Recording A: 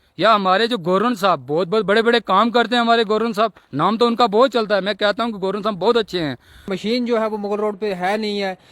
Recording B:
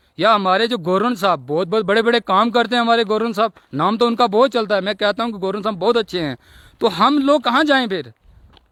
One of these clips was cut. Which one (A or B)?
A